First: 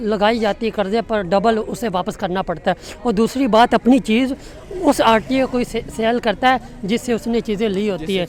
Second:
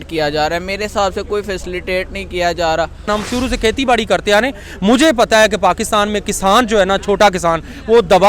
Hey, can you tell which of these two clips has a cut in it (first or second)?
second